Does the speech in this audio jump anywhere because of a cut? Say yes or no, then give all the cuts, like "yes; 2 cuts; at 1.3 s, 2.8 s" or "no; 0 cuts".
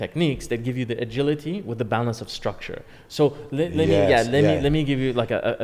no; 0 cuts